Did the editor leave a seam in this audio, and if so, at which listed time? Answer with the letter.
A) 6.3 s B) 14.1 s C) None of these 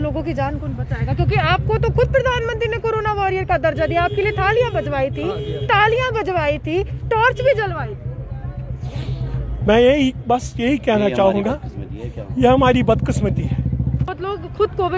B